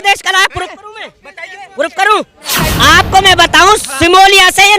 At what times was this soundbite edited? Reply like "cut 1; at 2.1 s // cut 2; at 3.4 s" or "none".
cut 1; at 2.4 s